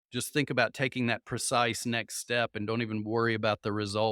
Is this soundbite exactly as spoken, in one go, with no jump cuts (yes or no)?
yes